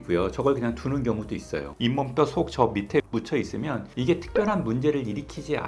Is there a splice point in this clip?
yes; 1 cut; at 1.7 s

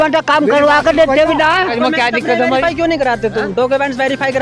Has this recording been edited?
yes; 1 cut; at 1.7 s

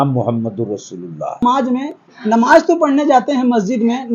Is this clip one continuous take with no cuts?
no; 1 cut; at 1.4 s

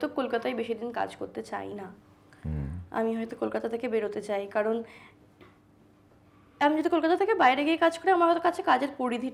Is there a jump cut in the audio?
no; 0 cuts

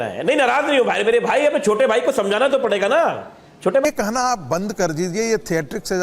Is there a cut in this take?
yes; 1 cut; at 3.9 s

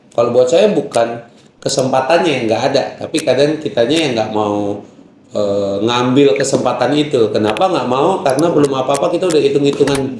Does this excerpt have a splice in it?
no; 0 cuts

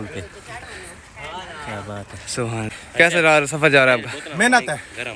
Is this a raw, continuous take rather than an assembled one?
no; 1 cut; at 2.7 s

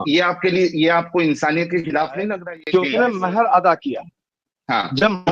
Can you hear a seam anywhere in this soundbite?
yes; 1 cut; at 2.4 s

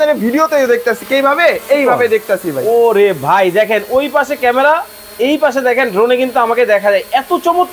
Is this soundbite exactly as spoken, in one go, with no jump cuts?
yes; 0 cuts

